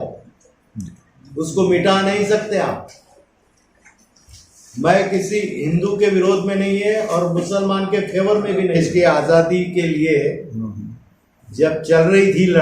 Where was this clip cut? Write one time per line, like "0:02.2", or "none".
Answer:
0:08.8